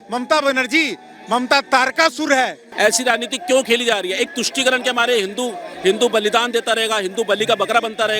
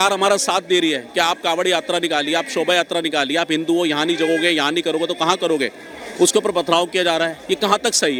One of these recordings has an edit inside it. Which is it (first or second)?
first